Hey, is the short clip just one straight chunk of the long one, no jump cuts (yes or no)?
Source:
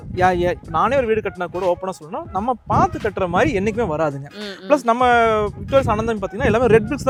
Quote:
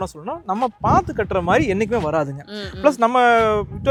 yes